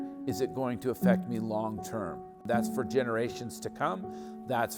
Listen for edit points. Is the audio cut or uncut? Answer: cut